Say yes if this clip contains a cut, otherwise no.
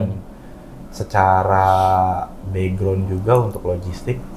no